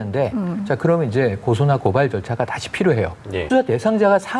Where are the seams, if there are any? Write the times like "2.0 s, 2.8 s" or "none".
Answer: 3.3 s

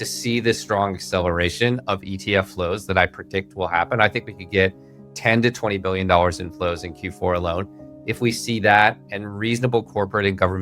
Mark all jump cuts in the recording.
none

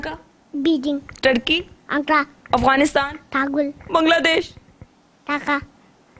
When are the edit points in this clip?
none

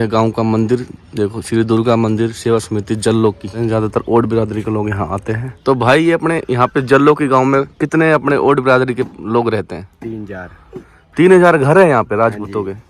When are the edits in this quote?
3.5 s, 5.4 s

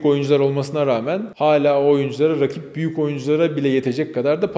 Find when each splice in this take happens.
1.3 s

